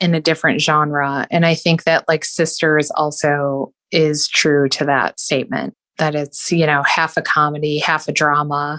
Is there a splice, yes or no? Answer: no